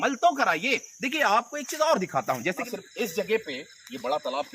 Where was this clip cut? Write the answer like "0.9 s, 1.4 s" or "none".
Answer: 2.6 s